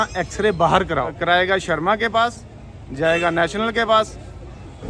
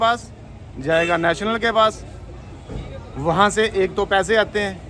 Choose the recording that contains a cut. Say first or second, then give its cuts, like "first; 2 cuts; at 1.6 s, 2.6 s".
first; 1 cut; at 1.1 s